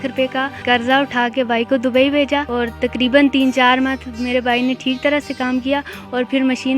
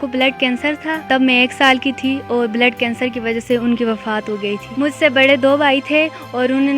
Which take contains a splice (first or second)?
second